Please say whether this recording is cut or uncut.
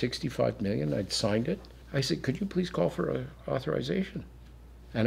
cut